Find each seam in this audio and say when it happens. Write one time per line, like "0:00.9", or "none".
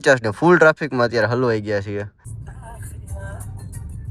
0:02.1